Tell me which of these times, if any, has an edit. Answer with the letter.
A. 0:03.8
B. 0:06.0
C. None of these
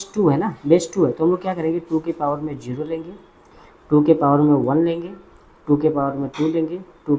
C